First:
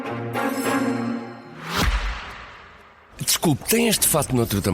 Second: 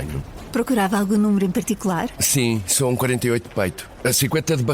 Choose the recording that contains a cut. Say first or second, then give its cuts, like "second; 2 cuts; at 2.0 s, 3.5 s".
first; 1 cut; at 1.5 s